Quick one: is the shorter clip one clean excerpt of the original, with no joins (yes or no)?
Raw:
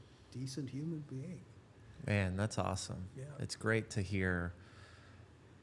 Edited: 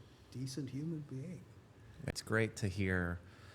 no